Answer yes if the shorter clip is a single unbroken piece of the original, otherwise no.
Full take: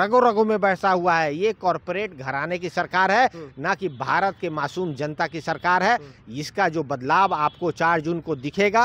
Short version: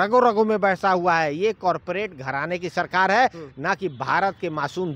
yes